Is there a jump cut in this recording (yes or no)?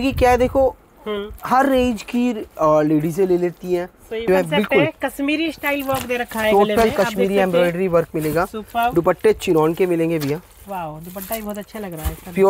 yes